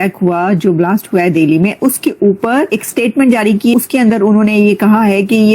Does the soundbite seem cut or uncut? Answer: cut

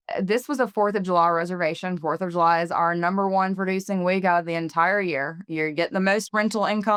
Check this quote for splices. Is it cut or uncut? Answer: uncut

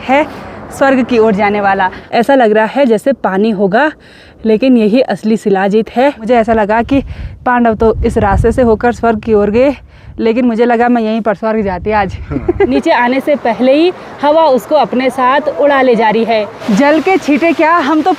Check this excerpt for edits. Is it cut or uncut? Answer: cut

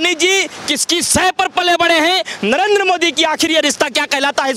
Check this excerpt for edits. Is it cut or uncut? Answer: uncut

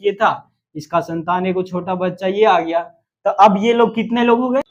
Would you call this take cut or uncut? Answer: uncut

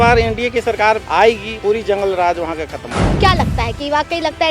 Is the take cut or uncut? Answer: cut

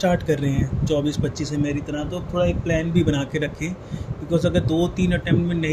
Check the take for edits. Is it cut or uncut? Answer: uncut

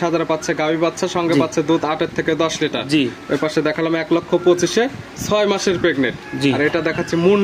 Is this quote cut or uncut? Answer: uncut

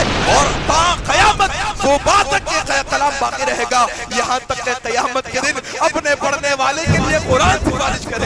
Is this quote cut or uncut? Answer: uncut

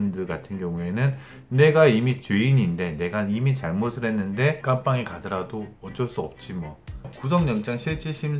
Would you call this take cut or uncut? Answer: cut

